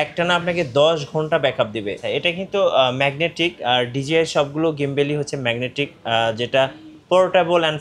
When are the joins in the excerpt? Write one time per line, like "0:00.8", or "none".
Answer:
0:02.1